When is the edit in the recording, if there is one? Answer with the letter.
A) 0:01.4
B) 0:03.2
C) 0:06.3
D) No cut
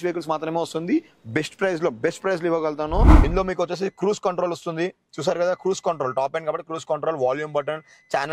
B